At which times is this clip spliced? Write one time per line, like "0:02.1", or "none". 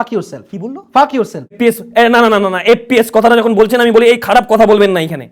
0:01.6